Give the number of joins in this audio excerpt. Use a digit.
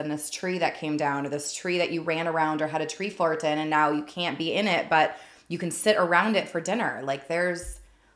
0